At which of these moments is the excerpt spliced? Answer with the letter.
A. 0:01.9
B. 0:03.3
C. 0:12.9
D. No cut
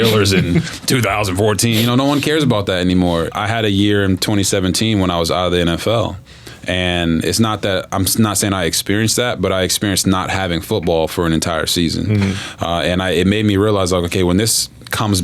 B